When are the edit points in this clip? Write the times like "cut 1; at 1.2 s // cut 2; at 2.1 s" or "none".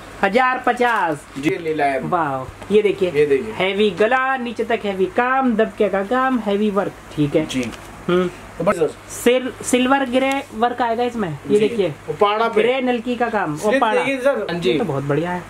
cut 1; at 1.5 s // cut 2; at 8.8 s // cut 3; at 14.5 s